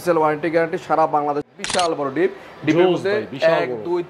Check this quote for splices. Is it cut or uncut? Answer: cut